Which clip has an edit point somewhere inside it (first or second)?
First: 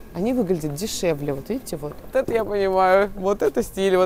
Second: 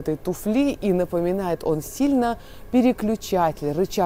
first